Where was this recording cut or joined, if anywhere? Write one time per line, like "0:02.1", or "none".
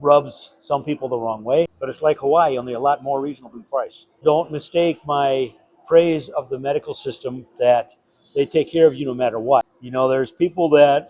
0:01.8
0:04.2
0:09.8